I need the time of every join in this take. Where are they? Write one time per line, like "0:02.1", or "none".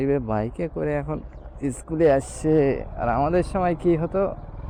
none